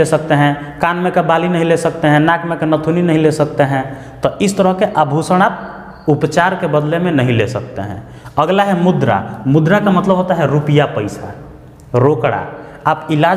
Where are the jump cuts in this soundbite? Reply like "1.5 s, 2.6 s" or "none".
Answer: none